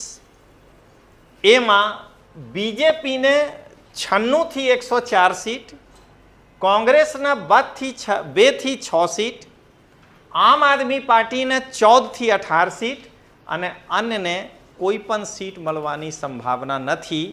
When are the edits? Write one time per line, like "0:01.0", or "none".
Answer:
none